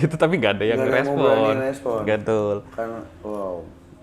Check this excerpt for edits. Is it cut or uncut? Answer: uncut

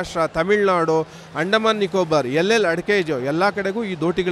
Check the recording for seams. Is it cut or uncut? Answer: uncut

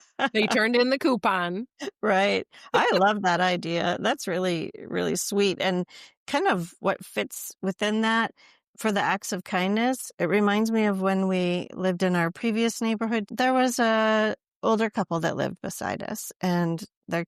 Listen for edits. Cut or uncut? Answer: cut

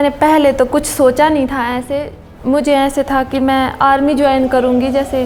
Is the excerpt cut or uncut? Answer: uncut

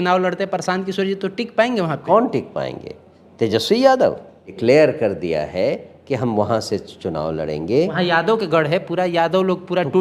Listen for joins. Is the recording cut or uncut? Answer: cut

